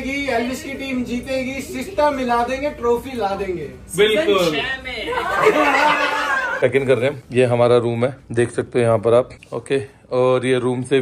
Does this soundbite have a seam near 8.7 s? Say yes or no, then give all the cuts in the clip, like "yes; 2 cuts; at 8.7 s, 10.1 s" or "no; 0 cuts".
no; 1 cut; at 6.6 s